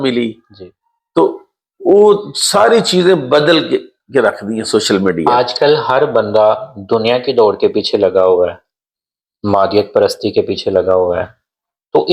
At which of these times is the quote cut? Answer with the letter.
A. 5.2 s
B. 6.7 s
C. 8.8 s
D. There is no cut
A